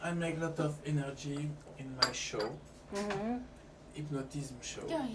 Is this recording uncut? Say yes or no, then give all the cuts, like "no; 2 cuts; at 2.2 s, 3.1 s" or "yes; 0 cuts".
yes; 0 cuts